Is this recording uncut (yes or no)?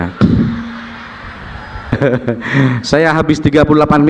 no